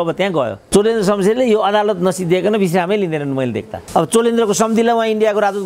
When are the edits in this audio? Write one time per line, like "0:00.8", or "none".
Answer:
0:03.7